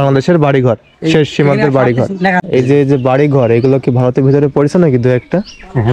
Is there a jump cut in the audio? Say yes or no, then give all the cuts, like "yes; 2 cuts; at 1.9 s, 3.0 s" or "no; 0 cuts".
yes; 1 cut; at 2.4 s